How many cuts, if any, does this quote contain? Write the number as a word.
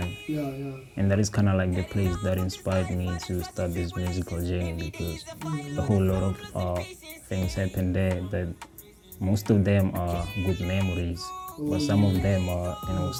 zero